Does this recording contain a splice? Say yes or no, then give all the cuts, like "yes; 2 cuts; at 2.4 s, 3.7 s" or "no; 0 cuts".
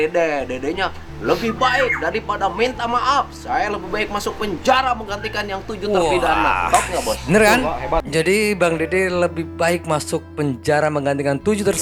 no; 0 cuts